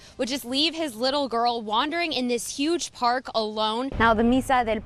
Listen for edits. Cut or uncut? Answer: cut